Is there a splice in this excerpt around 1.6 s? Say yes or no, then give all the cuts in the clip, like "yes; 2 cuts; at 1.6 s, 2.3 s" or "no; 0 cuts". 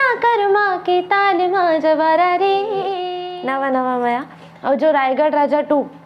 no; 1 cut; at 3.1 s